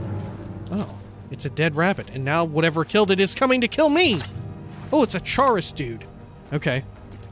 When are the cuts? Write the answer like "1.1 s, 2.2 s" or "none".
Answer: none